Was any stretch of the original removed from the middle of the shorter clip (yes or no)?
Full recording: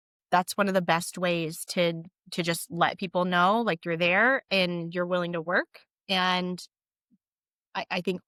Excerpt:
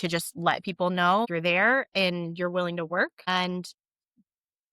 yes